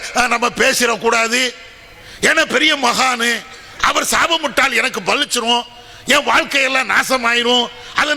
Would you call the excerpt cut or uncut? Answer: uncut